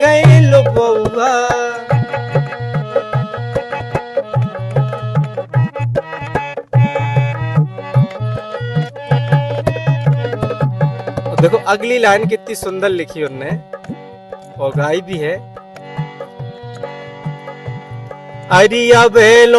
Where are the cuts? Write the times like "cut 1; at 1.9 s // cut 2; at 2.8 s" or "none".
none